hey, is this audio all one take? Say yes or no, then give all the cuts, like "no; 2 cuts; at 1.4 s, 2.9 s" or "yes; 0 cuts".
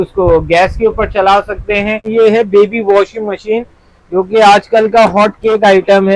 no; 1 cut; at 2.1 s